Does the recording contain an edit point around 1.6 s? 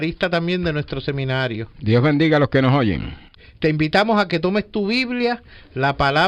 yes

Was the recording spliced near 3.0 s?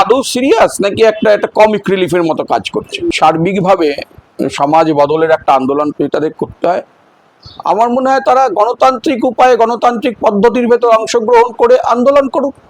yes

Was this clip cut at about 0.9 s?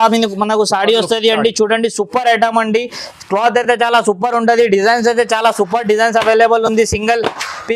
no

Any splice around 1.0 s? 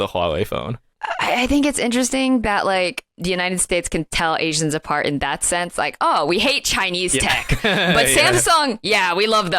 yes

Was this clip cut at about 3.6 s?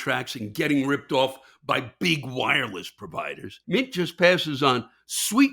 yes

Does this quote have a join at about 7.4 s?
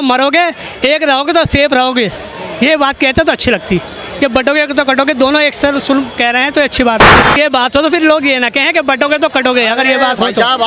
yes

